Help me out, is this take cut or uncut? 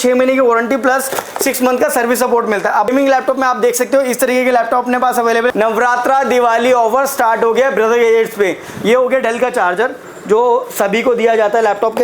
cut